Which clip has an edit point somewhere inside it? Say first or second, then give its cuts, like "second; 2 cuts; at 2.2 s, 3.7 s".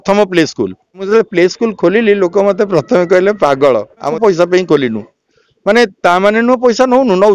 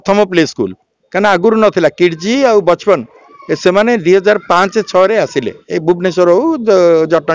first; 2 cuts; at 1.0 s, 4.1 s